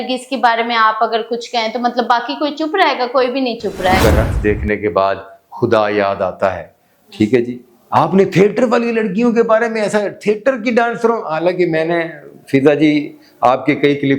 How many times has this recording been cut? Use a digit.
1